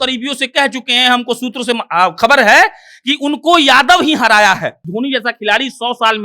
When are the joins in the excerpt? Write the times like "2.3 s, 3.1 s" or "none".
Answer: 4.8 s

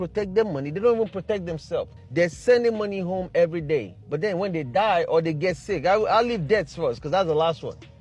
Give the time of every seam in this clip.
none

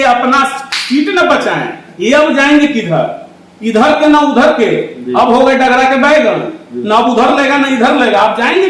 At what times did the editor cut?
none

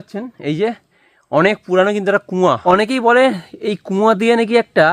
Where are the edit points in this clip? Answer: 2.6 s

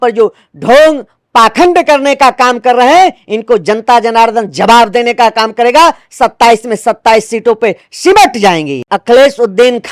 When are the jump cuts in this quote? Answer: 8.8 s

